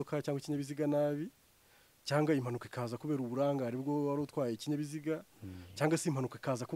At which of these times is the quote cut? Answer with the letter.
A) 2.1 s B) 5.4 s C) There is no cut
C